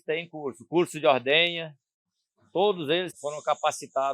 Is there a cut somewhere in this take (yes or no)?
yes